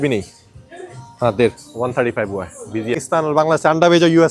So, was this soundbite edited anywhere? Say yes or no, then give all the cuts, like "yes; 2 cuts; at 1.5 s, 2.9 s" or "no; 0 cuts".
yes; 1 cut; at 3.0 s